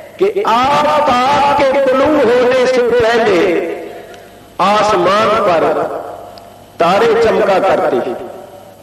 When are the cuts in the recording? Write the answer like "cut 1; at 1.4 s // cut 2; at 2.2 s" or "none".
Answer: none